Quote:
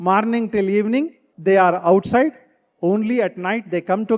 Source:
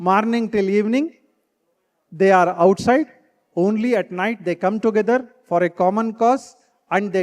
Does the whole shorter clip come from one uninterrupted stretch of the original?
no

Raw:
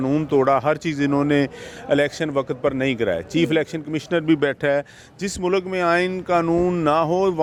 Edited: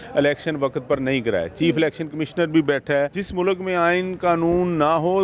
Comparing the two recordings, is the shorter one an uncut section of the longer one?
no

